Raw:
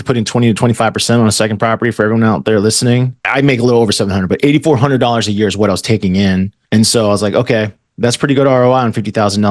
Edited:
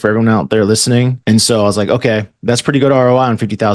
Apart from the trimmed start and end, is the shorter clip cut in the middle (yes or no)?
yes